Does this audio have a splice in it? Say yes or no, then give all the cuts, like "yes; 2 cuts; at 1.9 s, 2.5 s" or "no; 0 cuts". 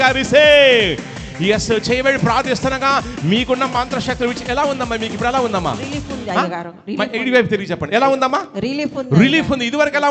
no; 0 cuts